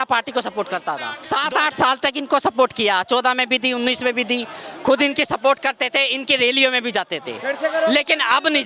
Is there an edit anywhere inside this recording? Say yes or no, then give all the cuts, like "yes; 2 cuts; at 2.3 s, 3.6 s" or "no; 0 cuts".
yes; 1 cut; at 1.1 s